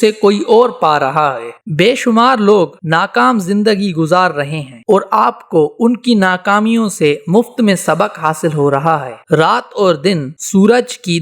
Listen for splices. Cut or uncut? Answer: uncut